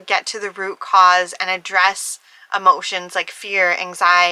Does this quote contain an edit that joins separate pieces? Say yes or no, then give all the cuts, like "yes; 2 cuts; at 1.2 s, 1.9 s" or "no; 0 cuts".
no; 0 cuts